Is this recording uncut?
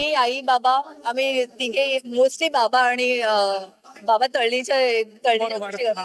yes; 0 cuts

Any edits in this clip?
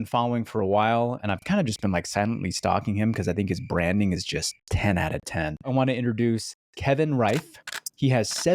yes; 3 cuts; at 1.2 s, 4.6 s, 5.7 s

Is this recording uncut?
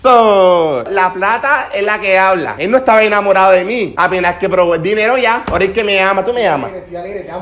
yes; 0 cuts

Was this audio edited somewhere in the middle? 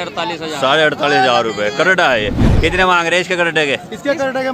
yes; 1 cut; at 2.5 s

